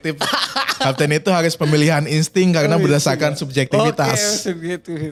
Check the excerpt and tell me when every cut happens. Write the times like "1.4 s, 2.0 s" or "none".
none